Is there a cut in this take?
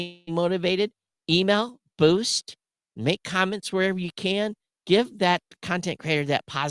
no; 0 cuts

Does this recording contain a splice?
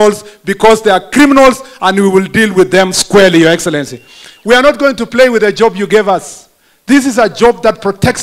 no; 0 cuts

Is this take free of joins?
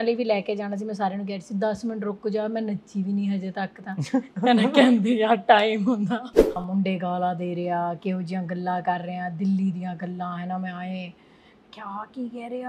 no; 1 cut; at 6.6 s

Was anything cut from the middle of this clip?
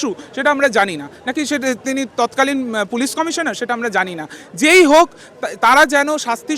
no; 0 cuts

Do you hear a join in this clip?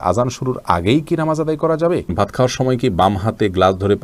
yes; 1 cut; at 2.1 s

